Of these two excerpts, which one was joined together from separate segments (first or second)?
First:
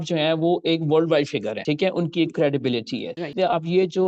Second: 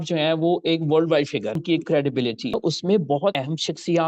second